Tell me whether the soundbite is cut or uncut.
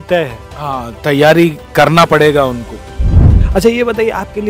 cut